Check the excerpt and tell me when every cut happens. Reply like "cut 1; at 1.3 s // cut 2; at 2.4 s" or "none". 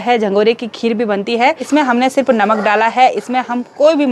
cut 1; at 1.7 s